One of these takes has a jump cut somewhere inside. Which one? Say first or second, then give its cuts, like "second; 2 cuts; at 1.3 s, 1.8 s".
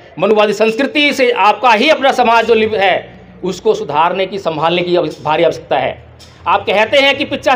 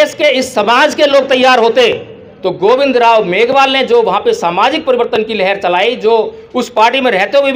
first; 1 cut; at 2.7 s